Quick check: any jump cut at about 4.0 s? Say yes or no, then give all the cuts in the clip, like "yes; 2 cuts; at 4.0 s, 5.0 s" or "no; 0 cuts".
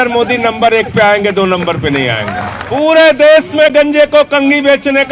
no; 1 cut; at 2.6 s